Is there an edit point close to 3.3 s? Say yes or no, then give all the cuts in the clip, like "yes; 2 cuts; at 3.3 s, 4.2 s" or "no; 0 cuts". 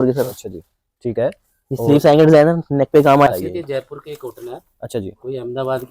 yes; 1 cut; at 3.3 s